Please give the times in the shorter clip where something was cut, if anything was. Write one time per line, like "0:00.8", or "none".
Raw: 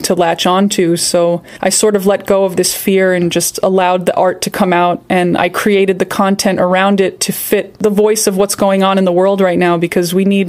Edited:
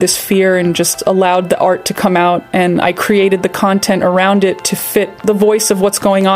none